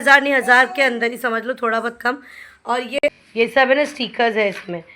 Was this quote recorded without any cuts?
no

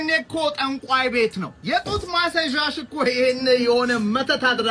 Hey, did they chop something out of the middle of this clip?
yes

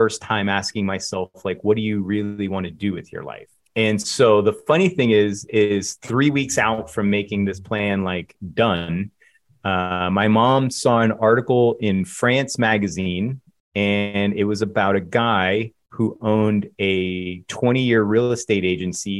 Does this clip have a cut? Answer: no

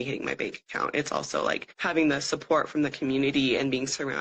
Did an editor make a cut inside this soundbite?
yes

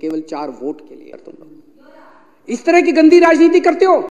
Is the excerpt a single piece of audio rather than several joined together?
no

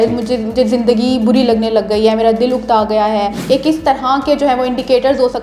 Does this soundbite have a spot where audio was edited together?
yes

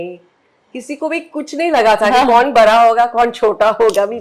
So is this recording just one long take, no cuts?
yes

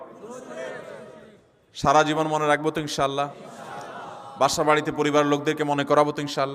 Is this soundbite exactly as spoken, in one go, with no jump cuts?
yes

